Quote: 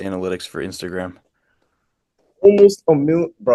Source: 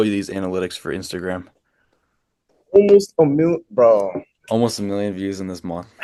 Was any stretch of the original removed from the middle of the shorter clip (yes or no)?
no